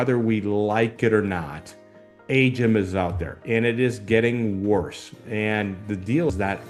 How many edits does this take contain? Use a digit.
0